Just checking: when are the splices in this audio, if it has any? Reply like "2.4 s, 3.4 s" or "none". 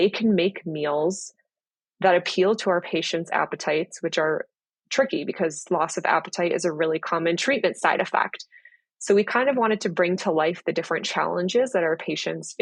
none